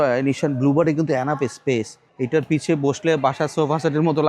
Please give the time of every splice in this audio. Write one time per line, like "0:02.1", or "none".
0:02.0